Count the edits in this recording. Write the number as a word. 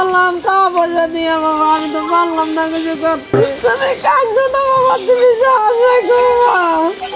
one